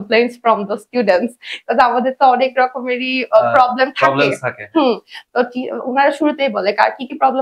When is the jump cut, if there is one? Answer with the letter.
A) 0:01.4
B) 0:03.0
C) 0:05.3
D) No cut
D